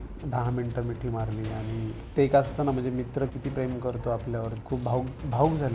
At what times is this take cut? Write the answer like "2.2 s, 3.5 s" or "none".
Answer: 4.6 s